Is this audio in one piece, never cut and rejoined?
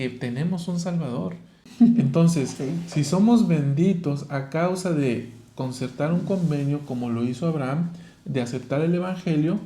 no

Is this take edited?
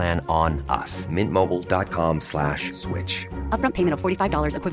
no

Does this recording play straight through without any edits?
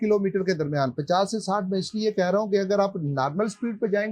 yes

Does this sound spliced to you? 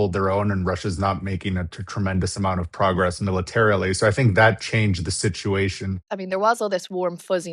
yes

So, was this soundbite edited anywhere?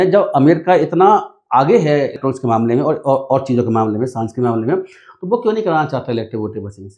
yes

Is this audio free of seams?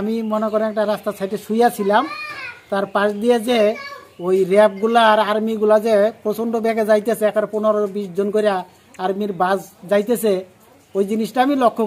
yes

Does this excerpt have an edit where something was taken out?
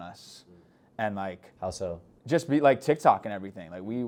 no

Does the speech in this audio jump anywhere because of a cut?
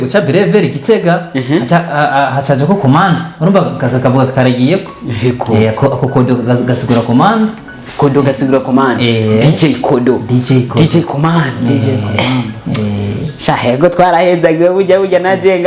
no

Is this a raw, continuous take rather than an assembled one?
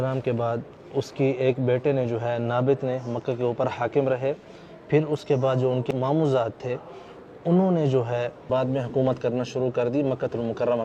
yes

